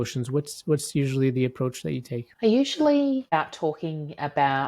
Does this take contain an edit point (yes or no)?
yes